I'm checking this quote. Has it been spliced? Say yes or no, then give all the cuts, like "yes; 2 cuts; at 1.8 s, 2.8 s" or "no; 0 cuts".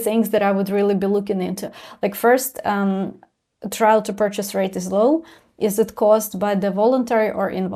no; 0 cuts